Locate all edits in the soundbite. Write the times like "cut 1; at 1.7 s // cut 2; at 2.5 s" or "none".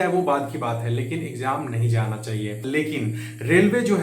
cut 1; at 2.6 s

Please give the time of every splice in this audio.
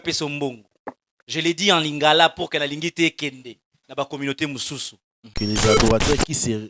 cut 1; at 5.3 s

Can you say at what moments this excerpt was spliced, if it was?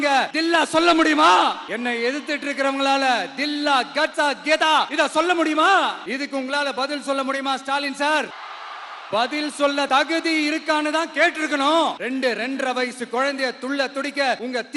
cut 1; at 1.7 s // cut 2; at 6.1 s // cut 3; at 12.0 s

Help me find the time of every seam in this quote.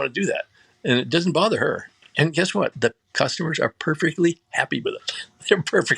cut 1; at 2.7 s

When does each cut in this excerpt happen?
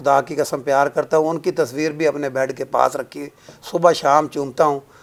none

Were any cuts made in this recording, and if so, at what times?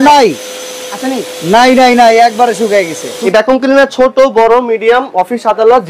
cut 1; at 3.2 s

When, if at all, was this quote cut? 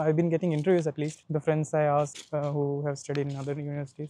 none

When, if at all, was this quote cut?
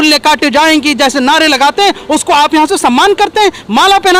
none

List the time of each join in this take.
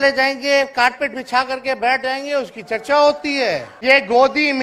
cut 1; at 3.7 s

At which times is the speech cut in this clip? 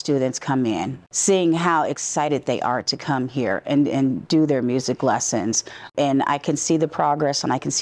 cut 1; at 0.9 s // cut 2; at 5.9 s

